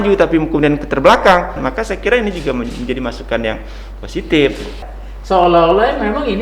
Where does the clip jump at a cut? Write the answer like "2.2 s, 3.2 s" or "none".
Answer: 1.6 s, 4.8 s